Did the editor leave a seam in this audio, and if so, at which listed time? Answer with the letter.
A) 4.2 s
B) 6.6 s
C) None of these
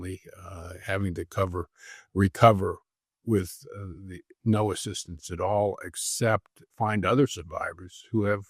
B